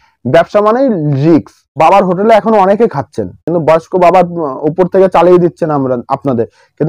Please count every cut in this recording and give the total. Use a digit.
2